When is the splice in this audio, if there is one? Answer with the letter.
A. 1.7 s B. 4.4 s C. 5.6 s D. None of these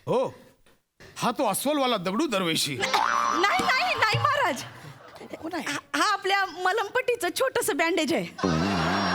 D